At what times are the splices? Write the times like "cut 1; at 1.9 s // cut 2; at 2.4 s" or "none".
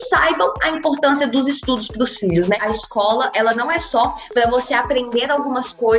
cut 1; at 2.6 s